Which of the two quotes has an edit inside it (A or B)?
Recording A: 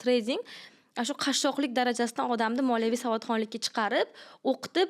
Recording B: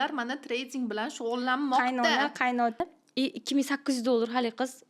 B